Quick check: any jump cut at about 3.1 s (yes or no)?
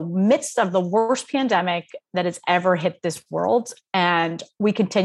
no